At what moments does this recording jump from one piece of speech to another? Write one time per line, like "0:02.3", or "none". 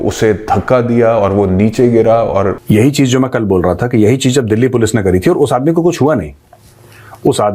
0:02.6